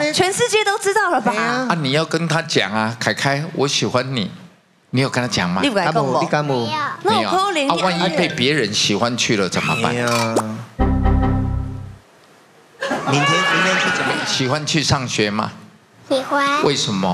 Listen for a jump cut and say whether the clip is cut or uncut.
cut